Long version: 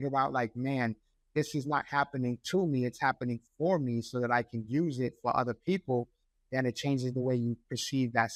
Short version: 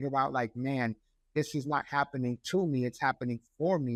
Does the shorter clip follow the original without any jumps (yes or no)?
yes